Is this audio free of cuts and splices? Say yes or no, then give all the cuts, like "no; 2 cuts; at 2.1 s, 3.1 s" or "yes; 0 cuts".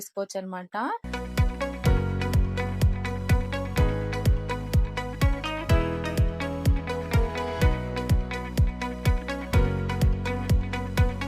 no; 1 cut; at 1.0 s